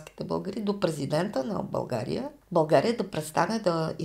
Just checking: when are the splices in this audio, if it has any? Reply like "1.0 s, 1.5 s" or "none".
2.4 s

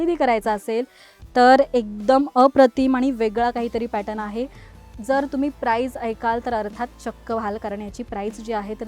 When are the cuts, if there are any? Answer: 4.7 s

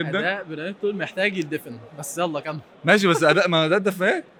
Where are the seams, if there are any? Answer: none

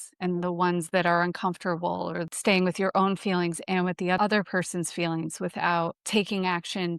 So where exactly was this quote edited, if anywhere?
2.3 s, 4.2 s, 6.0 s

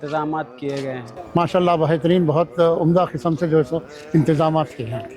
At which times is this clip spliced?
1.1 s

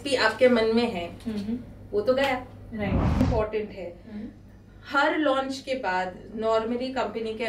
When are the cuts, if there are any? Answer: 3.2 s

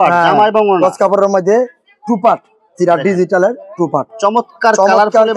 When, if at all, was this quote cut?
none

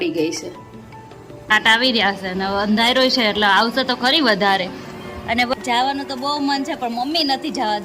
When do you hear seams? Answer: 1.5 s, 5.5 s

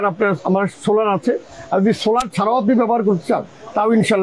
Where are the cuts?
none

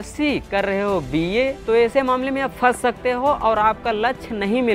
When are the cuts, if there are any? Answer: 1.6 s

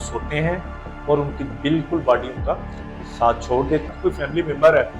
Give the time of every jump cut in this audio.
3.9 s

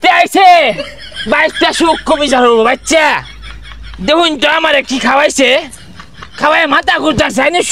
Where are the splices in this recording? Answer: none

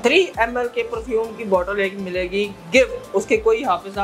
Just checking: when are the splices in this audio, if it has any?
none

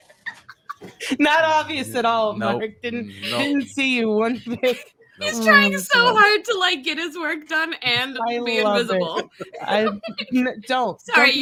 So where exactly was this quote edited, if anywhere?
none

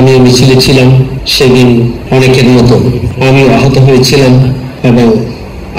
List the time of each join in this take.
1.2 s, 2.0 s, 3.1 s, 4.7 s

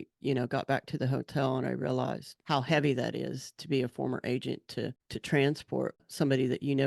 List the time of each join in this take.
2.3 s, 5.1 s, 6.0 s

